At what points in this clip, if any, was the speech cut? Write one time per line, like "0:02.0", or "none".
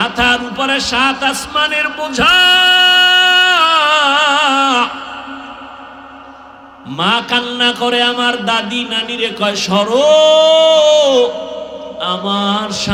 none